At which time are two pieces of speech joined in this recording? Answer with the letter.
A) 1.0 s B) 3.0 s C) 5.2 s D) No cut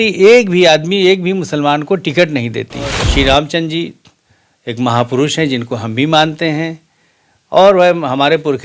B